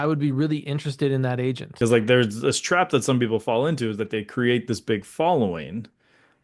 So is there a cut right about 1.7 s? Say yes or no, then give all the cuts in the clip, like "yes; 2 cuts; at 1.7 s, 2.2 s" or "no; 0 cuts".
yes; 1 cut; at 1.7 s